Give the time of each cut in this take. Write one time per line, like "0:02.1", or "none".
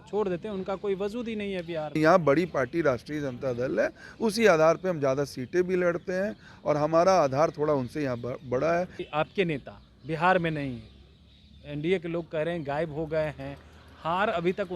0:02.0
0:09.0